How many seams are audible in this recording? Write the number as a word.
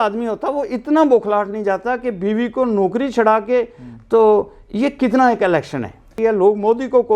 one